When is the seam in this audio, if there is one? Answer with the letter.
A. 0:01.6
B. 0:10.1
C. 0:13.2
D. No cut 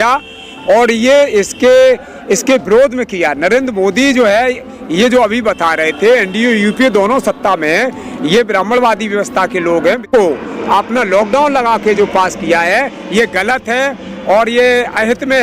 B